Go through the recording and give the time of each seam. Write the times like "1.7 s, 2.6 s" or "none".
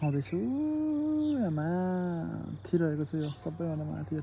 none